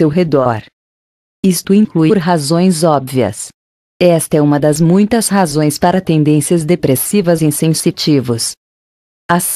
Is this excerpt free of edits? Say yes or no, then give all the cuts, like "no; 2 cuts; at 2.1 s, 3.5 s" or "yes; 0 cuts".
yes; 0 cuts